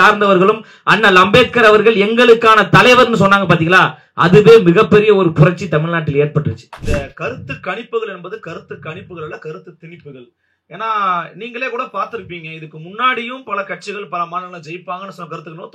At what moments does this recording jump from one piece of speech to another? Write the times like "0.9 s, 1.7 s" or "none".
6.7 s